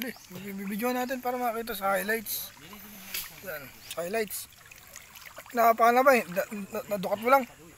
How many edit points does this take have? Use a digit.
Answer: 1